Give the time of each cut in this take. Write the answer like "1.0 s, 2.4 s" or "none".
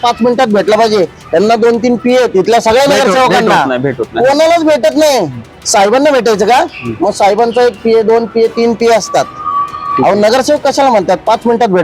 none